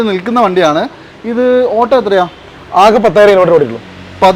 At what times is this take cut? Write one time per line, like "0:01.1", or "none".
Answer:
none